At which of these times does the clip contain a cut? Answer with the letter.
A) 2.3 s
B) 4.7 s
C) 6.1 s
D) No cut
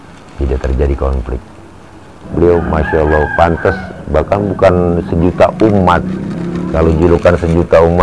A